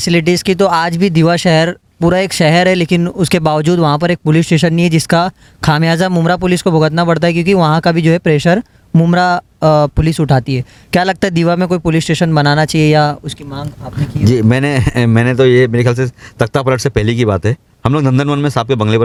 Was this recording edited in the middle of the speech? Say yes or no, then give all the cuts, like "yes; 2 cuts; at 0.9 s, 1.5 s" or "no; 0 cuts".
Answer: no; 0 cuts